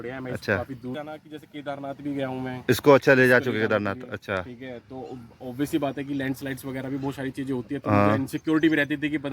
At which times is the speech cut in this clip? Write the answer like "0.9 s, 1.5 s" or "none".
1.0 s

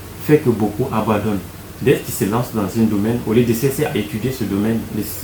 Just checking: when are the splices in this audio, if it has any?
none

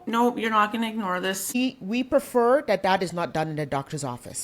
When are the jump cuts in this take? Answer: 1.6 s

